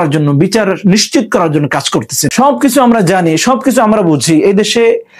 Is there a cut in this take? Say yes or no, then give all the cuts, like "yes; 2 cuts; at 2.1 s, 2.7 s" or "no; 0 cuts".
yes; 1 cut; at 2.3 s